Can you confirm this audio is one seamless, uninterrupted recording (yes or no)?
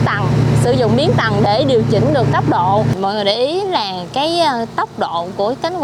yes